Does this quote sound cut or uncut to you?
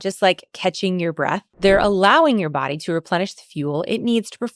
cut